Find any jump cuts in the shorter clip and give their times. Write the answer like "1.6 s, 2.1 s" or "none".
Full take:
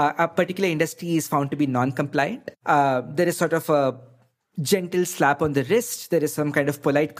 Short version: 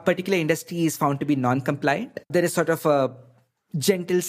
2.2 s

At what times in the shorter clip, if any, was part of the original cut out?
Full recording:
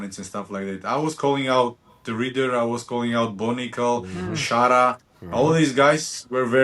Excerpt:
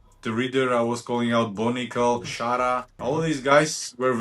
2.6 s

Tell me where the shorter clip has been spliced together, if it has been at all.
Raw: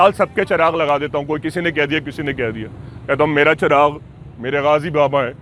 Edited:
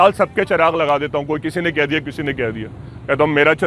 none

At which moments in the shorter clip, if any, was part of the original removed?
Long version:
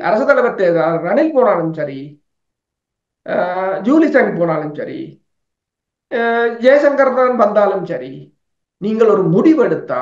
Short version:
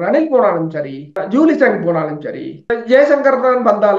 1.2 s, 2.7 s

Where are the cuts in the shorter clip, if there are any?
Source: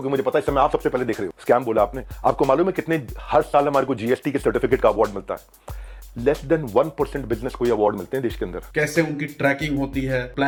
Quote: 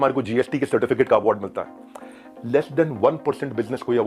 none

